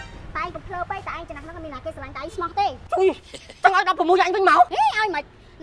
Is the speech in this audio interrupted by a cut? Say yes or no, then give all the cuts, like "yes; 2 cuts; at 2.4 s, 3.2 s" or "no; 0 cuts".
no; 0 cuts